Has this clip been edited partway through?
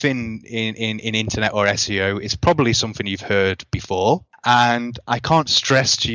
yes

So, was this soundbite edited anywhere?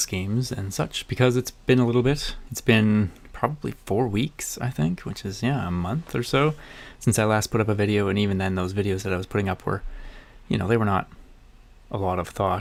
no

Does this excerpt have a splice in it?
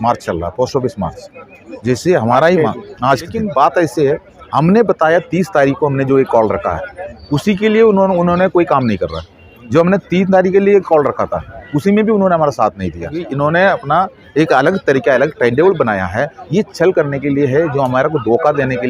yes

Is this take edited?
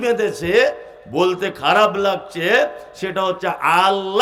no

